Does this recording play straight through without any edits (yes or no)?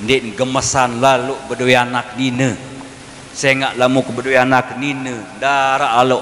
yes